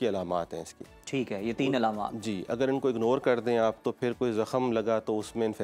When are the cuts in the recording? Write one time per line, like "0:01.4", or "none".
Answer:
none